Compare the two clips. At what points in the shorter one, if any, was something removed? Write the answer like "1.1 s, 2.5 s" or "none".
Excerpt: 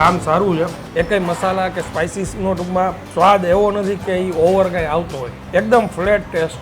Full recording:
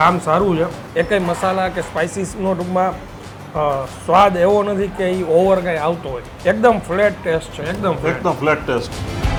3.0 s